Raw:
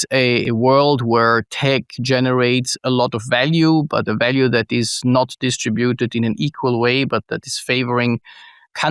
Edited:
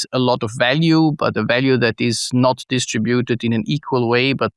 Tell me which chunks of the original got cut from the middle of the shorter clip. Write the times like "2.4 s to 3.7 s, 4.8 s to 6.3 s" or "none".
none